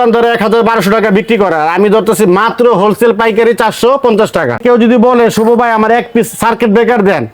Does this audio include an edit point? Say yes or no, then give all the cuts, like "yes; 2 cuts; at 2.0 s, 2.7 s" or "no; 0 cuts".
yes; 1 cut; at 4.6 s